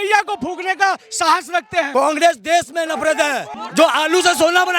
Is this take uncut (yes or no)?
no